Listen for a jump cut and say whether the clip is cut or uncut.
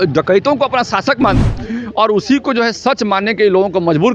cut